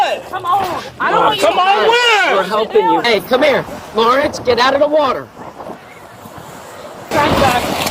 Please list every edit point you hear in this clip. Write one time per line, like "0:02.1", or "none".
0:03.0
0:07.1